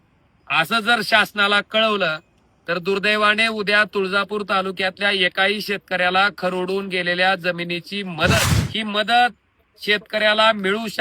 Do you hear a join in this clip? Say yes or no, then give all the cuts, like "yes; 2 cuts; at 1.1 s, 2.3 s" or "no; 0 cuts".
yes; 1 cut; at 8.6 s